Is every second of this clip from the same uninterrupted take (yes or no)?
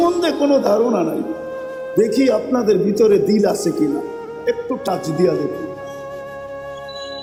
yes